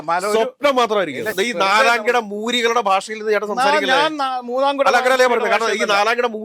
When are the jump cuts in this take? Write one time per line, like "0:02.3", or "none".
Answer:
0:01.3